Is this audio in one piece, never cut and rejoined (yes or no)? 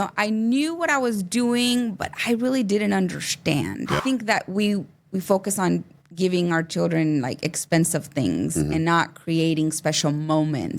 no